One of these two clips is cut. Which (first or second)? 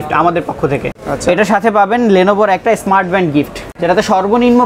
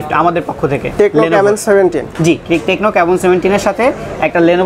first